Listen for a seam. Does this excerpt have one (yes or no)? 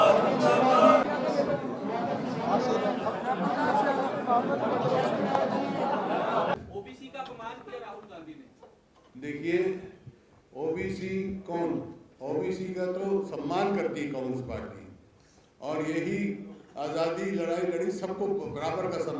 yes